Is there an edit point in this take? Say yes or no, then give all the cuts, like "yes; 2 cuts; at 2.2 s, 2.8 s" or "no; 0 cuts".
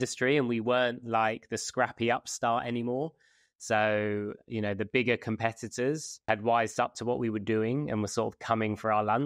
no; 0 cuts